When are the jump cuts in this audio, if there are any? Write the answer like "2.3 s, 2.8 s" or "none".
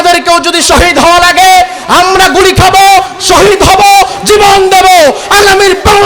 none